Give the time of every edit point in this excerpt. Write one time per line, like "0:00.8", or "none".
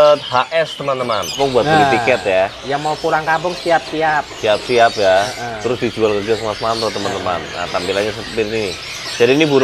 0:01.4